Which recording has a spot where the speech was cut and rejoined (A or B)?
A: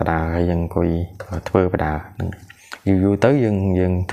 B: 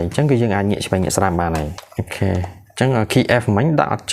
B